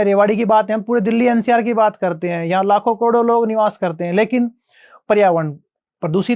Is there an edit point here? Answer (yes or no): no